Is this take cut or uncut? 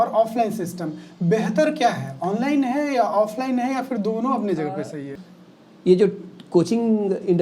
cut